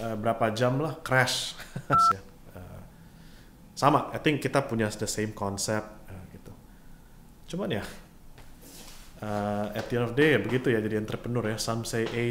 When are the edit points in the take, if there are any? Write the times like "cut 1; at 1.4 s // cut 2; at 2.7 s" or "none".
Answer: cut 1; at 2.0 s